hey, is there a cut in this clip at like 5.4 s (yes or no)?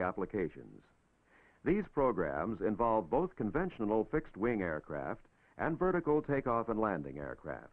no